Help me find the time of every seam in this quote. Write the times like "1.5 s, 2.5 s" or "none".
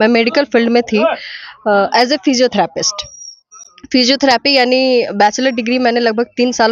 none